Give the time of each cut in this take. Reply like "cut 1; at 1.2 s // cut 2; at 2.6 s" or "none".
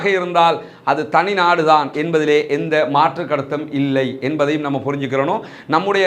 none